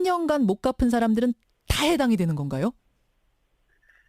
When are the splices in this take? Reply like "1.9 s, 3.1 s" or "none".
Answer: 2.1 s